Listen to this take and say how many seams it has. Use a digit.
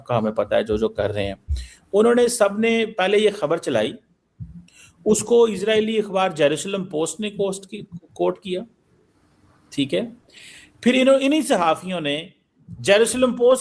0